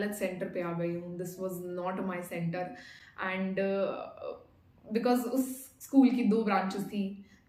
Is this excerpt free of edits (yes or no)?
yes